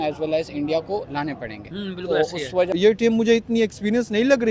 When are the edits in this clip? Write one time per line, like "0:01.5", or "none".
0:02.7